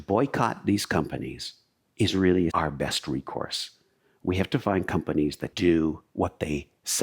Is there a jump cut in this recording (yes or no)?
yes